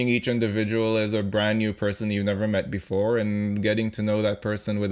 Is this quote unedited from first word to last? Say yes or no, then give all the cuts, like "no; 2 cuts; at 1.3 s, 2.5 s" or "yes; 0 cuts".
yes; 0 cuts